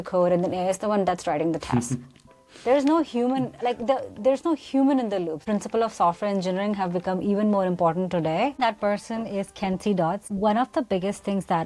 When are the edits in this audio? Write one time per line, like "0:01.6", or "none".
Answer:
0:05.4
0:08.6
0:10.3